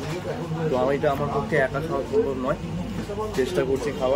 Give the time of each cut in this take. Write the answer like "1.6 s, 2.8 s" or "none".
2.9 s